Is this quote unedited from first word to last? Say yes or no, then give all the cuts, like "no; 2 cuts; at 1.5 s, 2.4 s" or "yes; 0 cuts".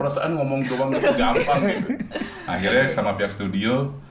yes; 0 cuts